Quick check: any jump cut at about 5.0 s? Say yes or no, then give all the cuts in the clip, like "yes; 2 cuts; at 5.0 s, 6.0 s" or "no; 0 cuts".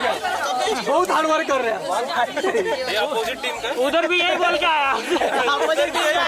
no; 0 cuts